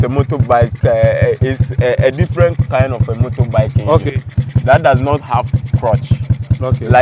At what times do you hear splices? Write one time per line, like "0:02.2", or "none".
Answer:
none